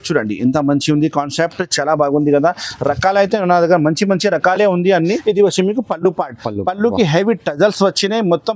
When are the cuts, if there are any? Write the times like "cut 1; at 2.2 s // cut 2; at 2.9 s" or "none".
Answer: cut 1; at 5.2 s